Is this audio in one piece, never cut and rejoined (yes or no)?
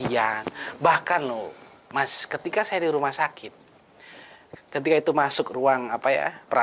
yes